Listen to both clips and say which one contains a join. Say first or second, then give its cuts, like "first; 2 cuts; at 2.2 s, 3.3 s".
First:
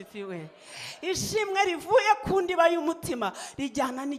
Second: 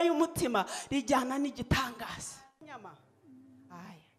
second; 1 cut; at 2.6 s